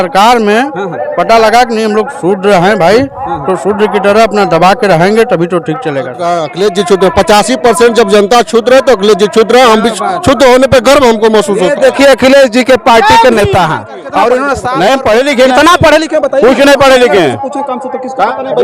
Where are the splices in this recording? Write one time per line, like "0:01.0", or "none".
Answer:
0:06.2
0:14.6